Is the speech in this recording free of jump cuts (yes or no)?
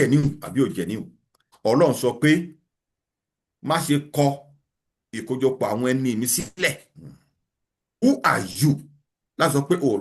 no